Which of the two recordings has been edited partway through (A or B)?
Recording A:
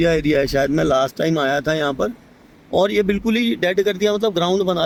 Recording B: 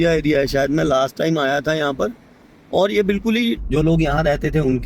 B